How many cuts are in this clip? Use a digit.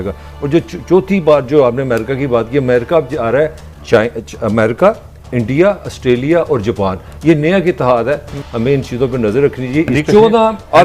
2